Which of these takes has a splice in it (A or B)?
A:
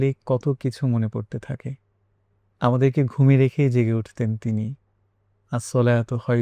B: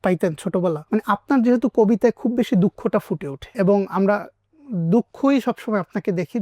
B